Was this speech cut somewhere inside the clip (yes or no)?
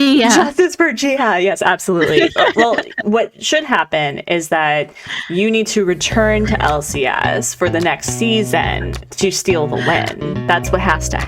no